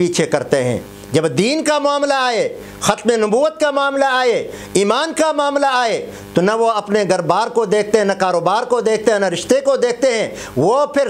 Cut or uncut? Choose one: uncut